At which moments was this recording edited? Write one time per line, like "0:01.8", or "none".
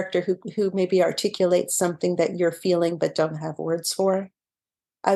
none